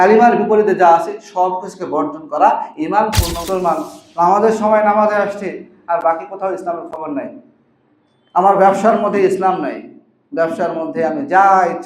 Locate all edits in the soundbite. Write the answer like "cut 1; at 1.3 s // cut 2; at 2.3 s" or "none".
cut 1; at 3.4 s